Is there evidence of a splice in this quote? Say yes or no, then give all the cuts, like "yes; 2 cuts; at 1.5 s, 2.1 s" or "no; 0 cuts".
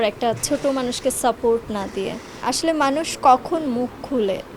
yes; 1 cut; at 2.4 s